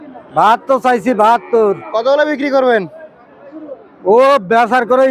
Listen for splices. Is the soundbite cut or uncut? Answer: uncut